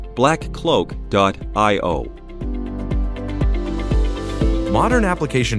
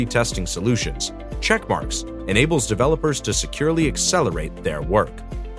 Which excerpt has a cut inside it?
first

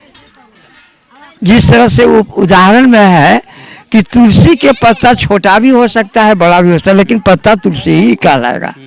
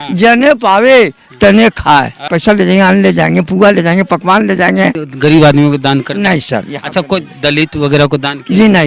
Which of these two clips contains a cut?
second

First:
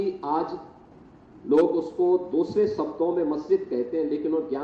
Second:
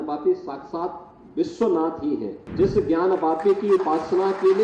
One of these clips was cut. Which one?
second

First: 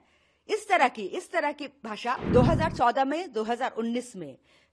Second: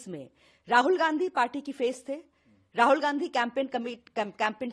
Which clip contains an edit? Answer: first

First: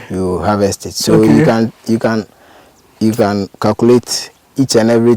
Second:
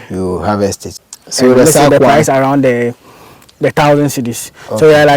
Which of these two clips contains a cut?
second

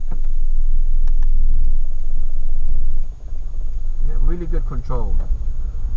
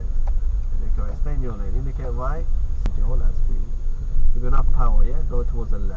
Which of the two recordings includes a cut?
second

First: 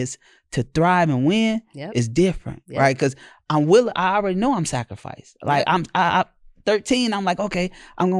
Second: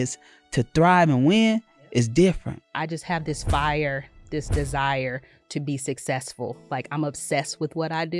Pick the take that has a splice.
second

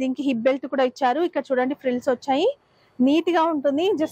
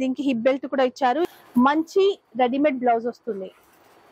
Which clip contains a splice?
second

